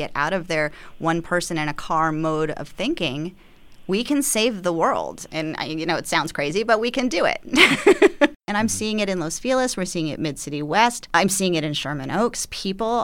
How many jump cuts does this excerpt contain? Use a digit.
2